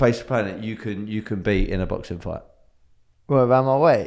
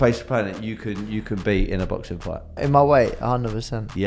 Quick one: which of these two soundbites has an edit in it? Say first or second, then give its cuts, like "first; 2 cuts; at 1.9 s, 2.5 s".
second; 1 cut; at 2.6 s